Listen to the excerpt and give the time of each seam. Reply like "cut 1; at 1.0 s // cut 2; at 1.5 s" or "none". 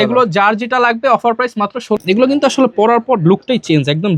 cut 1; at 2.0 s